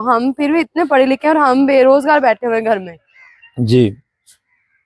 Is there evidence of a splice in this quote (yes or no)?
no